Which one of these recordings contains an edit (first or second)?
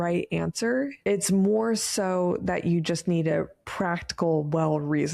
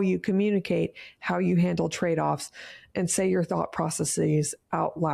first